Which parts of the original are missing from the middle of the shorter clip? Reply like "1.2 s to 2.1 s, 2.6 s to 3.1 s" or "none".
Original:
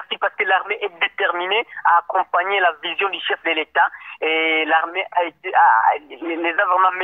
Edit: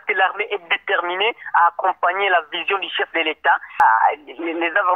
4.1 s to 5.6 s

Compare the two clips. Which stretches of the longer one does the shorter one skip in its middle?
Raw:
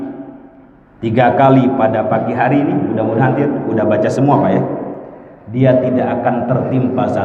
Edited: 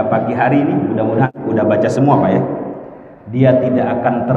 3.3 s to 3.5 s

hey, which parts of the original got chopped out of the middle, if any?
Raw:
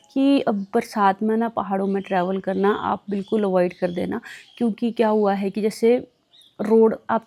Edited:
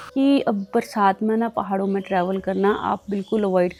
none

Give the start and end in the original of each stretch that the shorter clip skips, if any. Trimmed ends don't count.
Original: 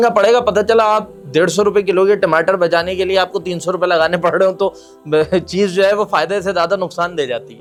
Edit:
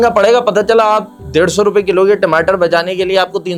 none

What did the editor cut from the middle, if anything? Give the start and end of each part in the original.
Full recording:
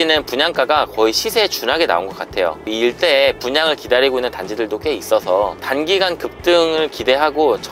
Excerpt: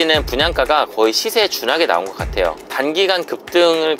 2.6 s to 5.6 s

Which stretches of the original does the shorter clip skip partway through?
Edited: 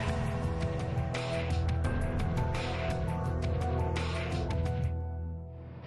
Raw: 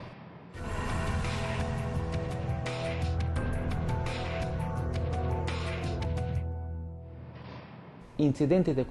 none

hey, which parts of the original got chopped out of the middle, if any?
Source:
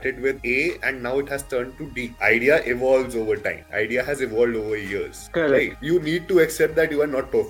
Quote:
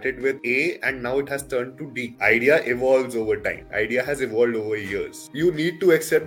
5.2 s to 5.7 s

